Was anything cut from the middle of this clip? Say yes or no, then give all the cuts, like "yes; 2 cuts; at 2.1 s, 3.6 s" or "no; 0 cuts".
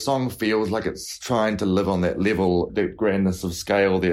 yes; 2 cuts; at 1.1 s, 2.9 s